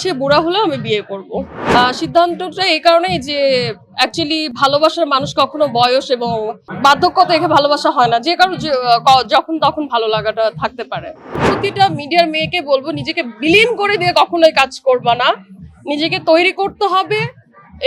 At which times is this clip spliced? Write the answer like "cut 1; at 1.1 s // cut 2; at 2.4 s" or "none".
cut 1; at 1.6 s // cut 2; at 6.6 s // cut 3; at 11.3 s